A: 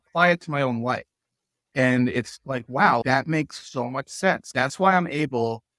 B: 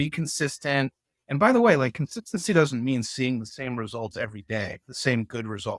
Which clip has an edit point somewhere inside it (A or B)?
A